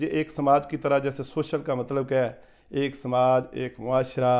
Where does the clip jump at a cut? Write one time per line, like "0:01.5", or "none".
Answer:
none